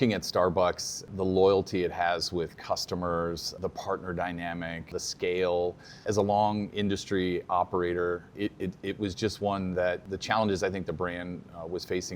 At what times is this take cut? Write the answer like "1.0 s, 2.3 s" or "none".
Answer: 1.0 s, 3.5 s, 4.9 s, 6.0 s, 8.3 s, 10.0 s

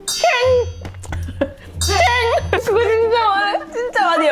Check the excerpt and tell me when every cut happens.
2.6 s

